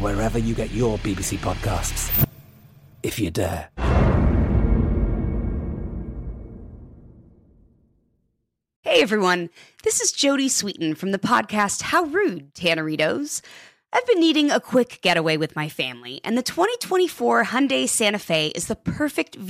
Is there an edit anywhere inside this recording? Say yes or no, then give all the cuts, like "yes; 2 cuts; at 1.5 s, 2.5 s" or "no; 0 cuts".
yes; 1 cut; at 8.7 s